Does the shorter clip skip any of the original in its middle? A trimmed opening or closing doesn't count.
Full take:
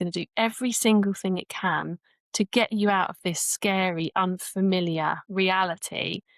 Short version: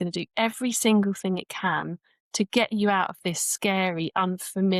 no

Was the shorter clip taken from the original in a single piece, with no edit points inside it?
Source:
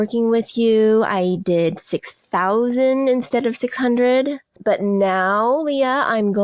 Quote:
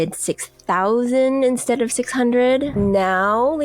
no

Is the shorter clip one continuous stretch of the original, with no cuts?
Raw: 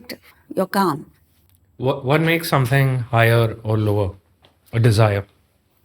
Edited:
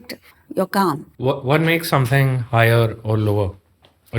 no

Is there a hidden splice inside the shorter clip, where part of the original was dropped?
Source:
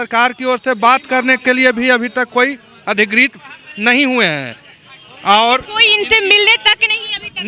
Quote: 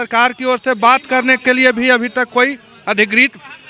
no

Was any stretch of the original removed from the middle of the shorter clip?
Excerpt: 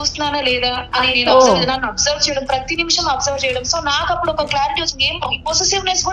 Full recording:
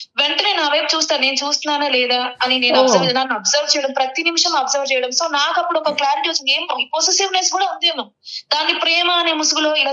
no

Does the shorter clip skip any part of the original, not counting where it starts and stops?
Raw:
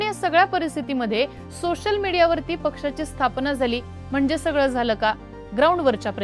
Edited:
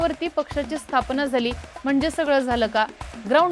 no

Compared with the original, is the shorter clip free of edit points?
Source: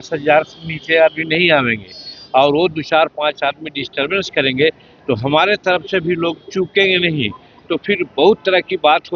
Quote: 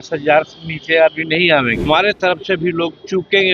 no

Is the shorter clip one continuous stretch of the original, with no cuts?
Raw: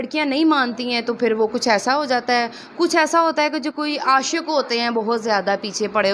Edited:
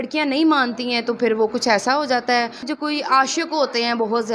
no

